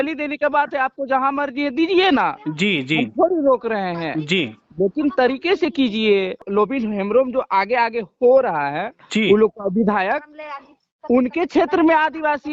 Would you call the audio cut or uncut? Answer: cut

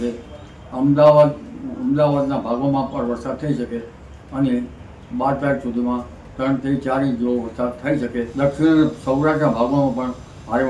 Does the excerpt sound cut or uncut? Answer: cut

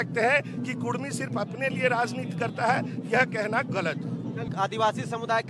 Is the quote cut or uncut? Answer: cut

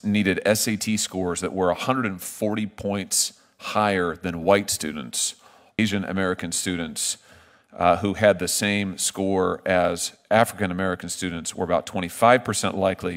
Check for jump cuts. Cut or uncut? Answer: cut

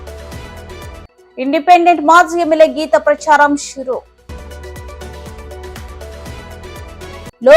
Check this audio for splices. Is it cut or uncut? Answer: cut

